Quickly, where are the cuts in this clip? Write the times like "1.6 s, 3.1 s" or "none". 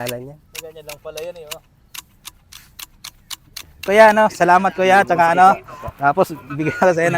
3.7 s